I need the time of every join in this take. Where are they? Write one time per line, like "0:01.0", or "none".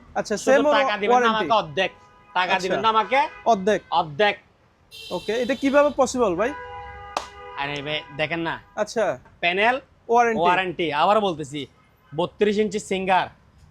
0:09.4